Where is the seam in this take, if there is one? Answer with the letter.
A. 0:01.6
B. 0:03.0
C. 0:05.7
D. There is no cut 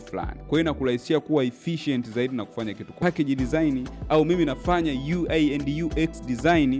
B